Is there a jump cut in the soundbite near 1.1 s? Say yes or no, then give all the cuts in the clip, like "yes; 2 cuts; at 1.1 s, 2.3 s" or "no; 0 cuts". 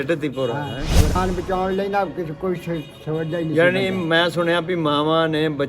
yes; 1 cut; at 1.1 s